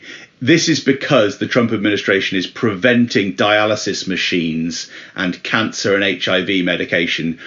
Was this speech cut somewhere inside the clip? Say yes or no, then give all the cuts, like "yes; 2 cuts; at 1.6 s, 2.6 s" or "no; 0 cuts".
no; 0 cuts